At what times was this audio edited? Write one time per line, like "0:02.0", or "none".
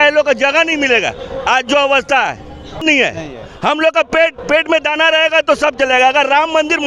0:02.8